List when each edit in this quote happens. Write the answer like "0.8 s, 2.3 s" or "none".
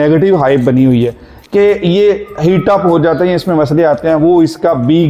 none